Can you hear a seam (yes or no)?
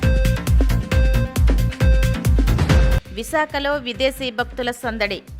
yes